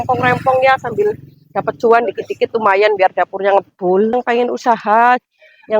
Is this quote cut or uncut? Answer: cut